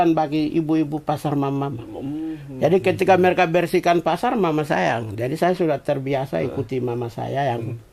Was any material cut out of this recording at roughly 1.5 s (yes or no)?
no